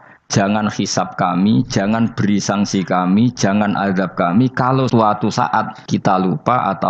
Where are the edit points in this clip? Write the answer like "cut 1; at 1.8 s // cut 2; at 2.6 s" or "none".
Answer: cut 1; at 4.9 s // cut 2; at 5.8 s